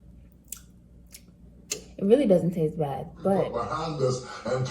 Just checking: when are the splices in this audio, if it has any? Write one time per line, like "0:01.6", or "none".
0:03.5